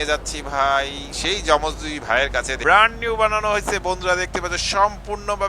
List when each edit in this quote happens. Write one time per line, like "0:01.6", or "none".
0:02.5